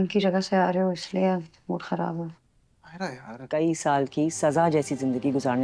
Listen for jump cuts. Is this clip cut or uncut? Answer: cut